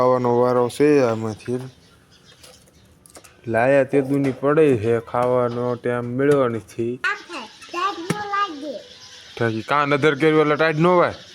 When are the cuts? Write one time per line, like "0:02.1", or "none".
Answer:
0:07.1